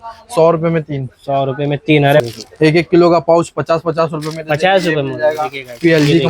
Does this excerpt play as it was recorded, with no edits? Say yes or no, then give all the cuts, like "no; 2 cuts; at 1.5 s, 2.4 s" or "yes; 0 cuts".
no; 1 cut; at 2.2 s